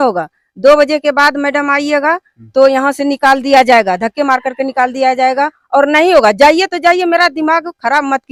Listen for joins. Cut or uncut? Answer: uncut